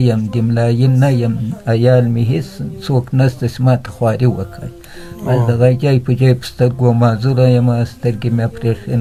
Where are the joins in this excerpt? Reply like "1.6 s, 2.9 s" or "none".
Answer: none